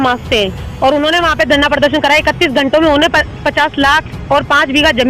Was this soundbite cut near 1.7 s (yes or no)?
no